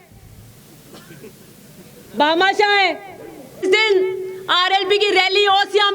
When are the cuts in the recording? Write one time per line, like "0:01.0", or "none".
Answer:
0:03.6